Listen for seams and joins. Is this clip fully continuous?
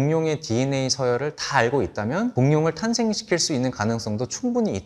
yes; 0 cuts

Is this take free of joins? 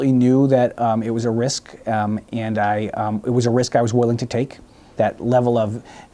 no; 1 cut; at 4.8 s

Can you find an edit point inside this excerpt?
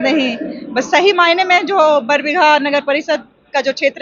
no; 0 cuts

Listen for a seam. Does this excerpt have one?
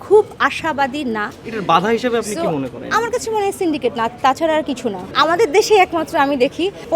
yes; 2 cuts; at 1.4 s, 5.0 s

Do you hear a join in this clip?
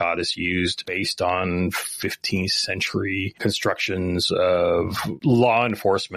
yes; 3 cuts; at 0.9 s, 3.3 s, 5.1 s

